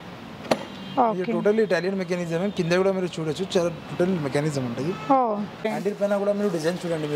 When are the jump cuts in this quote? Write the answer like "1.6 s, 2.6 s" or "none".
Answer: 5.7 s